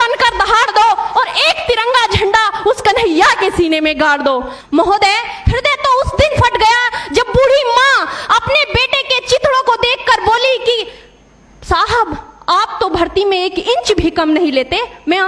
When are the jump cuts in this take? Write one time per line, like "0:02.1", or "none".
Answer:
0:04.5